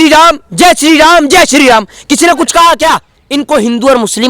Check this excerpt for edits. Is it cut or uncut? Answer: cut